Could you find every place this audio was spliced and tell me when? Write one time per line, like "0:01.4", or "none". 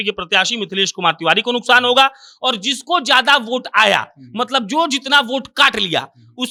none